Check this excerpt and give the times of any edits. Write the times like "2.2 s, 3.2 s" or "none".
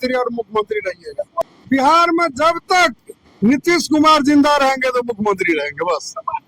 1.4 s